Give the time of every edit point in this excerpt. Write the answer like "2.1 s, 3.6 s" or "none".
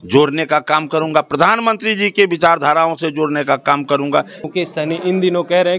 4.4 s